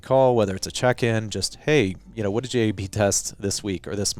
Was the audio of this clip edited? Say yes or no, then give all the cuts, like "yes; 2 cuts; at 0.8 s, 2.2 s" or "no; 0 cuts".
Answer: no; 0 cuts